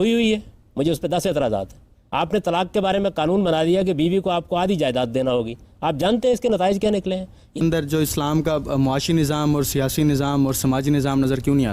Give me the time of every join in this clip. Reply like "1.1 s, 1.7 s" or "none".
7.6 s